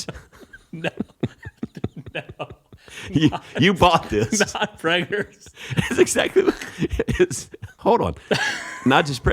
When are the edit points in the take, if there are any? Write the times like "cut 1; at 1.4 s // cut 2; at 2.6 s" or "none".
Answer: cut 1; at 7.7 s